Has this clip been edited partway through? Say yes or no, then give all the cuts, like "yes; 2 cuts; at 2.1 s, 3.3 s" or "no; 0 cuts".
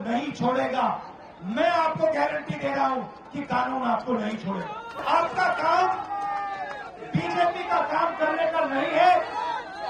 yes; 1 cut; at 5.0 s